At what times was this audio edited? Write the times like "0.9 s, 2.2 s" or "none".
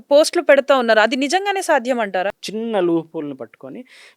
2.4 s